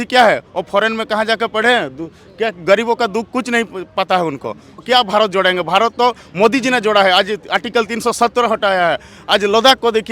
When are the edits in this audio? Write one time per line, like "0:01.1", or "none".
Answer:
0:04.8